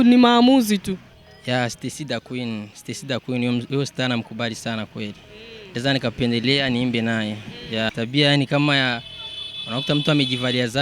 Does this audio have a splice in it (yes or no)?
yes